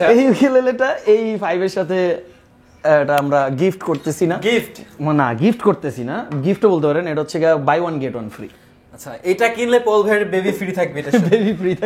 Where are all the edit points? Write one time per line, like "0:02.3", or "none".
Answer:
none

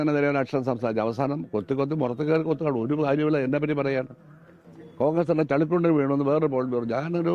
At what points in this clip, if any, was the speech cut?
0:04.8

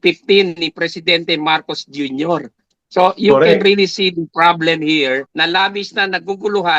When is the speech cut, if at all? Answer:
0:05.3

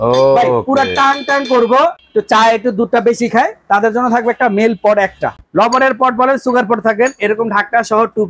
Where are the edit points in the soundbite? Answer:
0:02.0
0:05.3

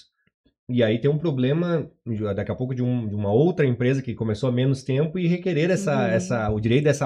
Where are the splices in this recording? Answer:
none

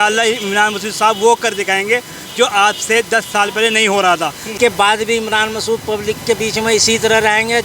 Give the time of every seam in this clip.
0:04.4

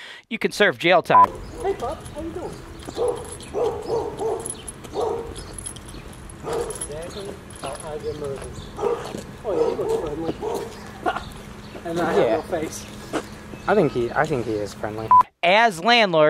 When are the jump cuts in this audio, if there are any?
0:01.1
0:15.3

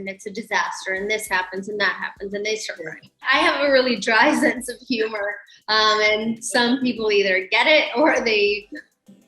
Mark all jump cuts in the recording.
0:03.3

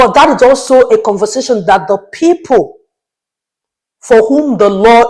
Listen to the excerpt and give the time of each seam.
none

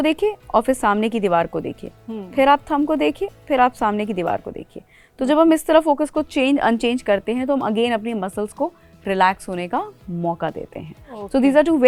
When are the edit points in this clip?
none

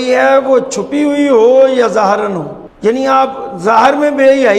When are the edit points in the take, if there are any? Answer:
0:02.6

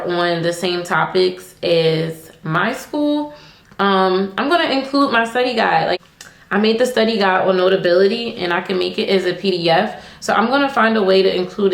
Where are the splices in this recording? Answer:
0:06.0

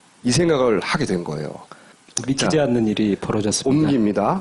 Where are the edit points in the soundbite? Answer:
none

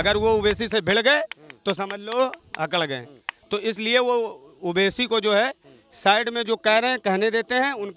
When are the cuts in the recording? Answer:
none

